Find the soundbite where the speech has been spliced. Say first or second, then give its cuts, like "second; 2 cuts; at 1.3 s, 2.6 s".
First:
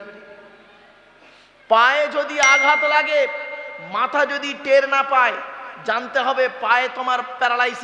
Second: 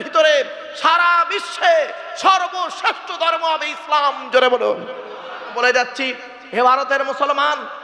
second; 1 cut; at 5.5 s